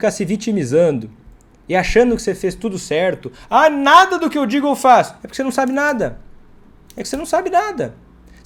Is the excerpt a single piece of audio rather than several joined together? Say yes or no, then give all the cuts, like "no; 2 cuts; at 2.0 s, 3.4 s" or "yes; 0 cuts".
yes; 0 cuts